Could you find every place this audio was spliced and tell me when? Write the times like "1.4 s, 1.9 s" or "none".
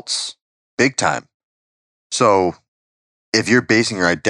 none